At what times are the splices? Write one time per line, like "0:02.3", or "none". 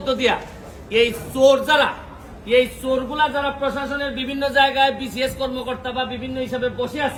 none